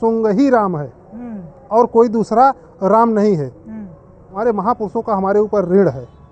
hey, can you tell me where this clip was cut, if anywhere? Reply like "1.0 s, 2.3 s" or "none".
4.4 s